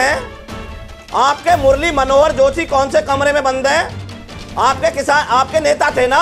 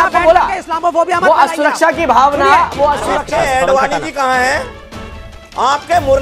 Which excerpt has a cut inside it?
second; 1 cut; at 3.1 s

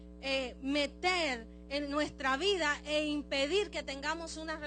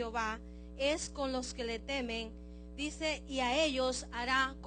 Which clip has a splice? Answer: second; 1 cut; at 2.2 s

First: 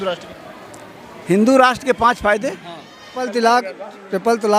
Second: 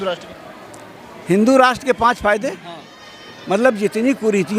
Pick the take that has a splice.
first; 1 cut; at 3.3 s

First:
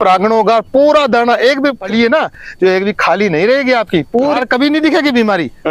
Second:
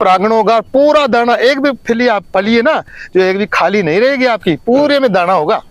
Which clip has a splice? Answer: first; 2 cuts; at 1.8 s, 4.4 s

